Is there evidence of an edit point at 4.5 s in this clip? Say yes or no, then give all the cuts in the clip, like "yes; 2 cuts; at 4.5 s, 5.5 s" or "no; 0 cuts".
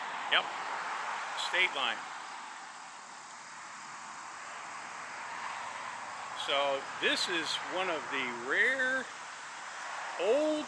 no; 0 cuts